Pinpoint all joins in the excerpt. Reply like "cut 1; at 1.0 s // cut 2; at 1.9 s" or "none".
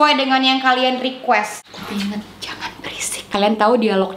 cut 1; at 1.7 s // cut 2; at 3.1 s

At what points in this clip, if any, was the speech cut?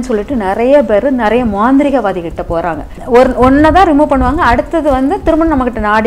cut 1; at 2.9 s

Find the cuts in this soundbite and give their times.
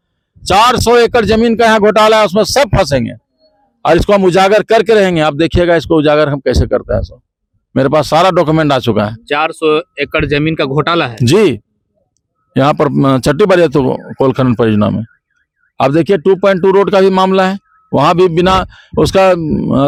none

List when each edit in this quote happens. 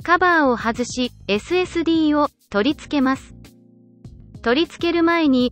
none

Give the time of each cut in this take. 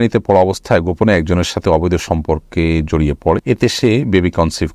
cut 1; at 3.4 s

